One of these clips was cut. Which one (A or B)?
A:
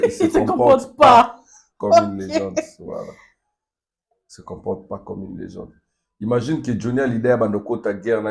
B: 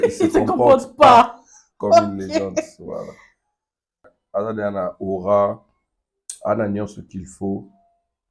B